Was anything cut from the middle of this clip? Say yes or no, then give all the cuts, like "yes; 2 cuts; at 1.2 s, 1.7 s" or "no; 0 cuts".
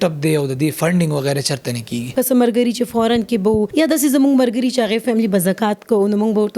yes; 2 cuts; at 2.1 s, 3.7 s